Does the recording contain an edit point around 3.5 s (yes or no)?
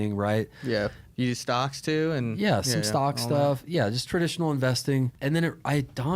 no